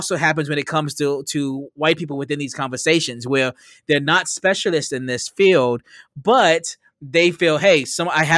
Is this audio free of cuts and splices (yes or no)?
yes